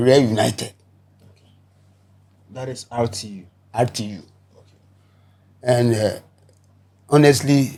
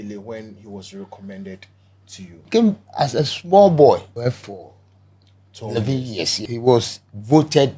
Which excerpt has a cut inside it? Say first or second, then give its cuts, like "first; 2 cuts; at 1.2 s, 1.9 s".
second; 3 cuts; at 2.5 s, 4.1 s, 6.5 s